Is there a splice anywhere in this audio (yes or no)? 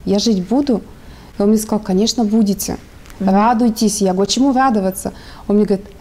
no